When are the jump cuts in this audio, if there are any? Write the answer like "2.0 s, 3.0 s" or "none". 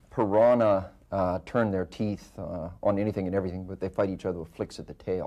none